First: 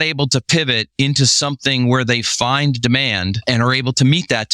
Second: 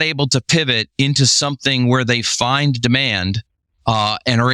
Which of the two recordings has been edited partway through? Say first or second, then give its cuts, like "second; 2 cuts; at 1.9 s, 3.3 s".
first; 1 cut; at 3.4 s